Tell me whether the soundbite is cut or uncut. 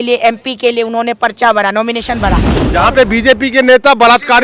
cut